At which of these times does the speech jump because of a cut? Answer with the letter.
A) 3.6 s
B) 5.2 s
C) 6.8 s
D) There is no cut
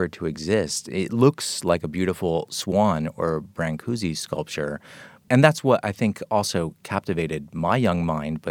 B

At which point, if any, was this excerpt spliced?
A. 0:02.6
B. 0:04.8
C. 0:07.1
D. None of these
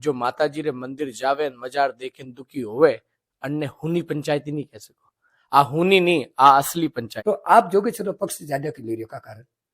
C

